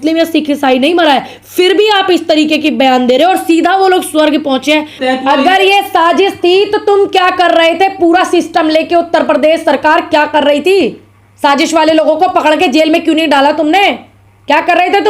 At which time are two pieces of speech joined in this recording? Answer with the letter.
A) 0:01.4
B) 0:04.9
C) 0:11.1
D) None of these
B